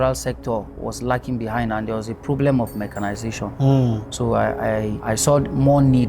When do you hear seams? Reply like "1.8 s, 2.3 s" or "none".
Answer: 5.0 s